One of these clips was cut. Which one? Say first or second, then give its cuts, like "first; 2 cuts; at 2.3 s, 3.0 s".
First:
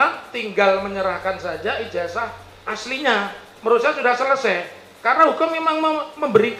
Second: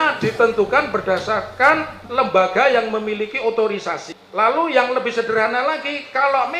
second; 2 cuts; at 2.0 s, 4.2 s